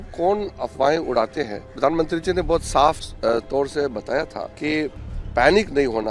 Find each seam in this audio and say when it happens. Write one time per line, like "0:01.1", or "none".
0:01.6
0:03.1
0:04.4